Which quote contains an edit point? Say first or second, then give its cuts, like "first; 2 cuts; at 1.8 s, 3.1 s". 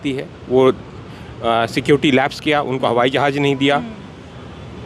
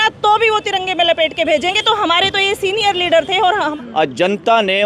second; 1 cut; at 3.7 s